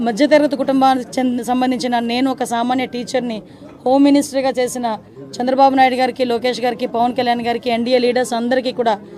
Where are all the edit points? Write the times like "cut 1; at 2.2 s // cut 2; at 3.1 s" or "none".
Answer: none